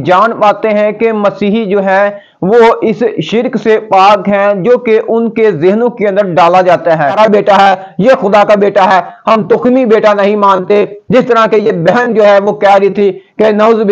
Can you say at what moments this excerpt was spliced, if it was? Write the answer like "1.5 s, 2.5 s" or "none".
7.2 s